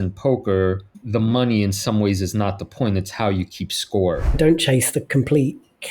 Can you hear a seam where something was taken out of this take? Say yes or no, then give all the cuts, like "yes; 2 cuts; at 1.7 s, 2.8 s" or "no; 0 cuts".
yes; 2 cuts; at 0.9 s, 4.4 s